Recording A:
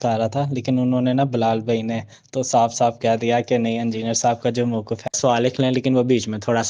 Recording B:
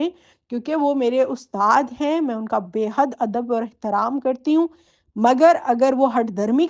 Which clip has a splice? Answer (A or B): A